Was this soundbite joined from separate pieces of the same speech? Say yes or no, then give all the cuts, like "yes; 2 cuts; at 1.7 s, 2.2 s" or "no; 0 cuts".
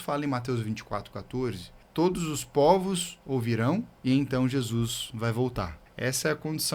yes; 3 cuts; at 1.7 s, 3.9 s, 5.8 s